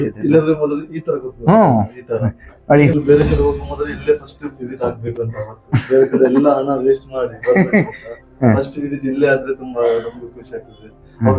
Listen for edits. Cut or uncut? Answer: cut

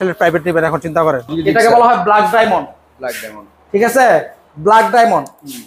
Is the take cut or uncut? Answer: cut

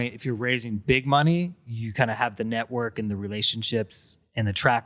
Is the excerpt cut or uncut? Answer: uncut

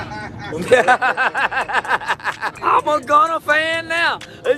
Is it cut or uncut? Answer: cut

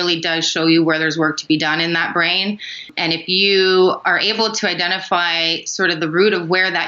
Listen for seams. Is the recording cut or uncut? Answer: cut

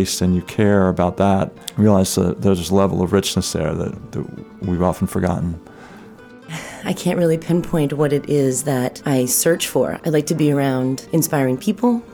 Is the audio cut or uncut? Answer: cut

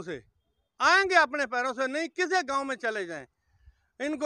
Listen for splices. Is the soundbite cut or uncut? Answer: uncut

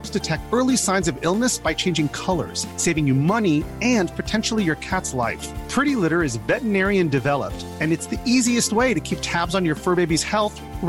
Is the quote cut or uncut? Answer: uncut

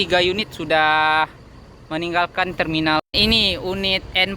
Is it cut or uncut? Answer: cut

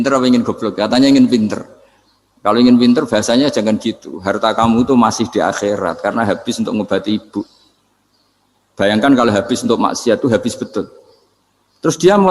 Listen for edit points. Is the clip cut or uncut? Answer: uncut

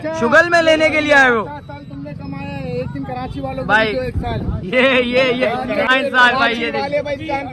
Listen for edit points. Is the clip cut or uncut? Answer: cut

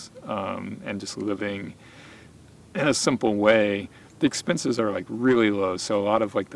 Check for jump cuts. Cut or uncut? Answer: uncut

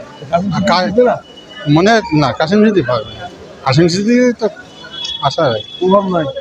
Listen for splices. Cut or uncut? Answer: uncut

